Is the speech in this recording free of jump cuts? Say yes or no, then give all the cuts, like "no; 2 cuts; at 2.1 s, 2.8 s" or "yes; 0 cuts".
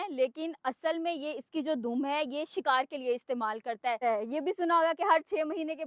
no; 1 cut; at 4.0 s